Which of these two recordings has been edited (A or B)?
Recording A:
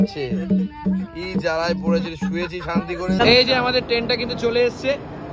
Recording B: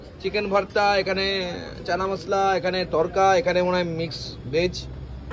A